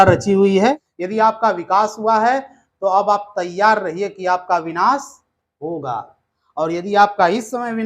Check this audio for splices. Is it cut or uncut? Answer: cut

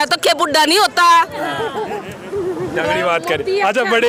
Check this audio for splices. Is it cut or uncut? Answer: uncut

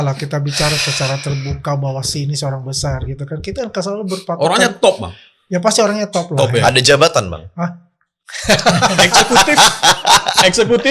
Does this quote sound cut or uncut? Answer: uncut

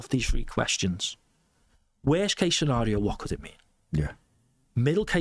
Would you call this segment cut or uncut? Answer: uncut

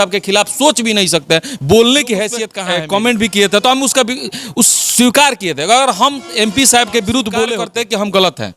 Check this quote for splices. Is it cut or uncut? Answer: cut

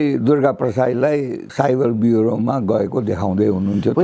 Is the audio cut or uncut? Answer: cut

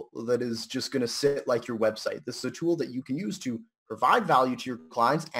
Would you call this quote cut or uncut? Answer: uncut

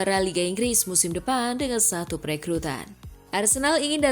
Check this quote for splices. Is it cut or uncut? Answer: cut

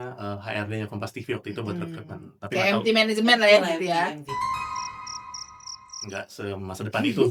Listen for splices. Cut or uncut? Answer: uncut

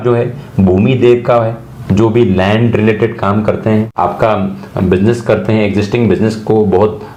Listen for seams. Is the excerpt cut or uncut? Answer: uncut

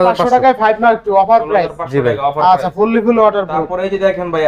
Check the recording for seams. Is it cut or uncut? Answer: uncut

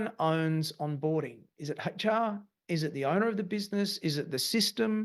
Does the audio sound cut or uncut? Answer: uncut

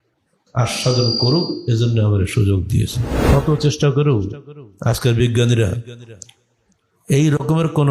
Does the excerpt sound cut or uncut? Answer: cut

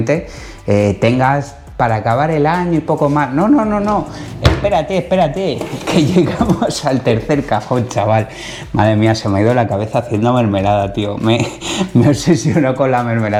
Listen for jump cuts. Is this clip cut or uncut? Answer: uncut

